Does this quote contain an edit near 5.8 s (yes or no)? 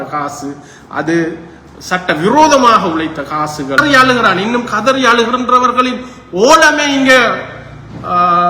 no